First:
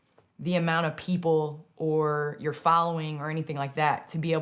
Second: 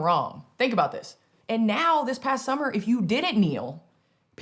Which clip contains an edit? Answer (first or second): second